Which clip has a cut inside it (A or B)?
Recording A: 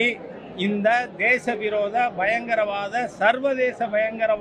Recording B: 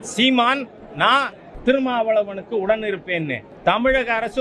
B